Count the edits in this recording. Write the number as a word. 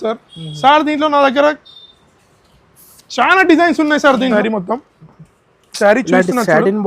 one